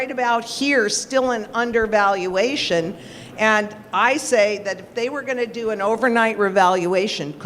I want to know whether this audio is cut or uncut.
uncut